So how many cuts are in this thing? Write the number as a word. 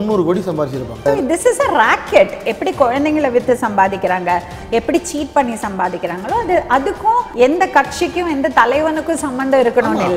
two